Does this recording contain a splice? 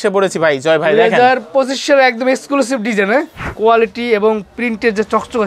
yes; 1 cut; at 3.4 s

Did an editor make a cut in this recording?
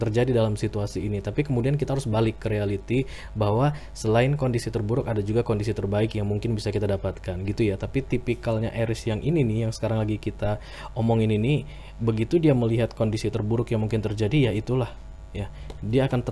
no; 0 cuts

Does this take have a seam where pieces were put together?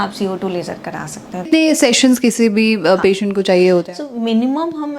yes; 1 cut; at 1.5 s

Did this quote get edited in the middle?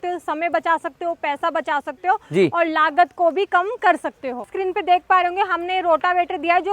yes; 1 cut; at 4.4 s

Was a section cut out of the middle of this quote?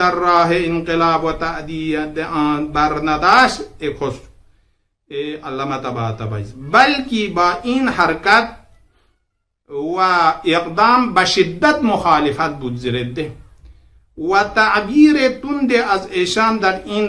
no; 0 cuts

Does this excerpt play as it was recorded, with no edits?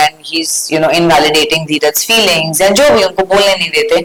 yes; 0 cuts

